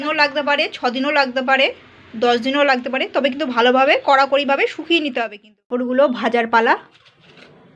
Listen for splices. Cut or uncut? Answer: cut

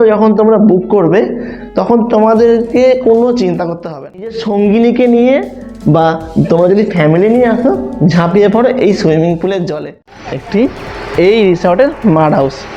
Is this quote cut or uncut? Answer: cut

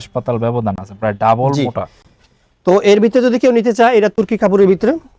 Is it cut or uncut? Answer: uncut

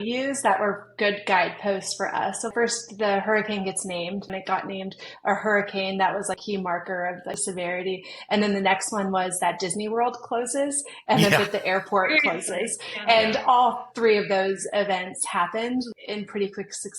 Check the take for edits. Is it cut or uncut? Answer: cut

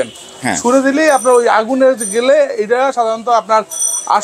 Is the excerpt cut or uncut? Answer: uncut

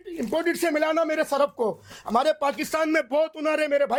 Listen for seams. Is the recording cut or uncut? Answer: uncut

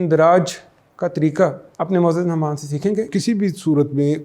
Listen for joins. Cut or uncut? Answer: cut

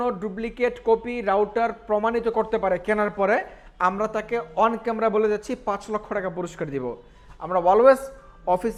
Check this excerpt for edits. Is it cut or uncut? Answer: uncut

